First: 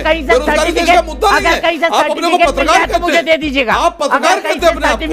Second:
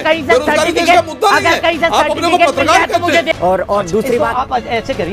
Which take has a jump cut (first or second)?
second